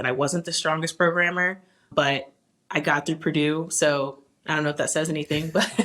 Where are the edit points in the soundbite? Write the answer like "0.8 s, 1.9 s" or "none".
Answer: 1.9 s